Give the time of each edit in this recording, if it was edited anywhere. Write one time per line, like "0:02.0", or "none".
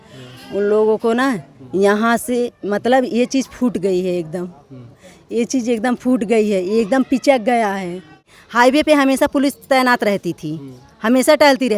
0:08.4